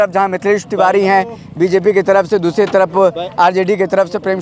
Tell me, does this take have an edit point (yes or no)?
no